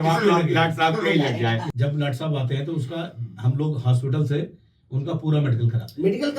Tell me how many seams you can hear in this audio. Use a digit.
1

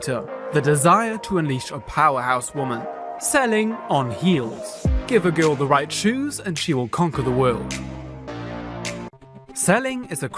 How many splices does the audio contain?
1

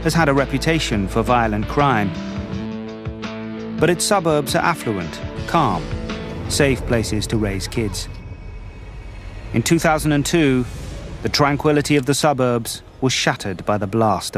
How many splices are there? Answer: 0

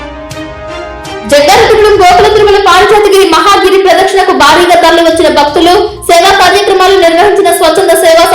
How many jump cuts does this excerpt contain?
1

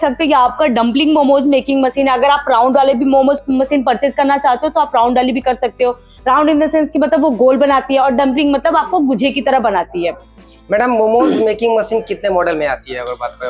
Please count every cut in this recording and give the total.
0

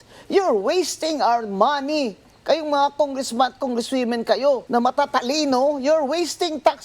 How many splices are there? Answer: 1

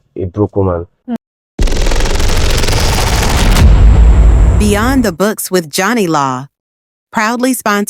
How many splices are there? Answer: 1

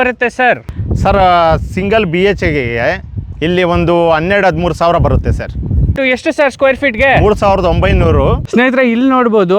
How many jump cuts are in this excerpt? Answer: 2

